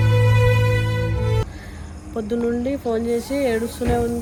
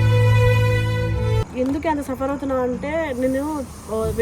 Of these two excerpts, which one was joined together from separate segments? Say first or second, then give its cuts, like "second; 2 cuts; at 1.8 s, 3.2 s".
second; 1 cut; at 1.5 s